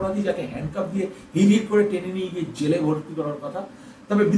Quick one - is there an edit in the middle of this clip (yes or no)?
no